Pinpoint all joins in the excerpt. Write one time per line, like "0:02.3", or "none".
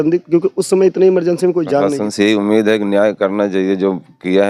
0:02.0